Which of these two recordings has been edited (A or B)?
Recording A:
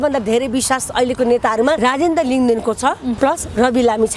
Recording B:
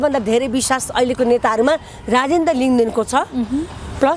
A